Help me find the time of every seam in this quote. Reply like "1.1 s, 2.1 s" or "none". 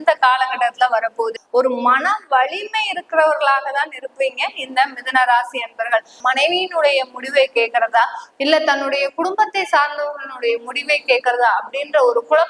1.4 s, 6.1 s